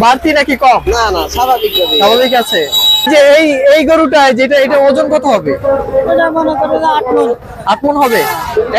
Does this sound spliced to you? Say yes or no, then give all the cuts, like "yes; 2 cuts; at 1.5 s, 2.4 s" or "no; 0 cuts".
yes; 1 cut; at 3.1 s